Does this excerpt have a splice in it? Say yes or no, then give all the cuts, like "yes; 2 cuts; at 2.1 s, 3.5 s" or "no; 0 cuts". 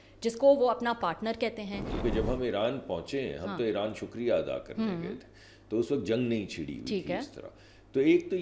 yes; 1 cut; at 2.0 s